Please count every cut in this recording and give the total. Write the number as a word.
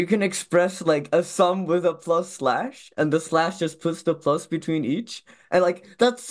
zero